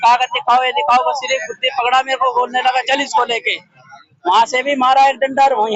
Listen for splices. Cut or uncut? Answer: uncut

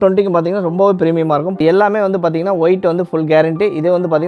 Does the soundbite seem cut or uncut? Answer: uncut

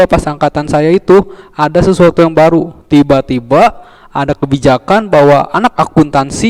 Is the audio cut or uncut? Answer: uncut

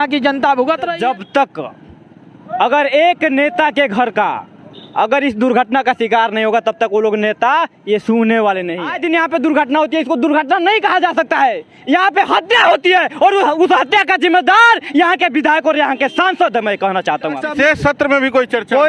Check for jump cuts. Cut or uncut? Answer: cut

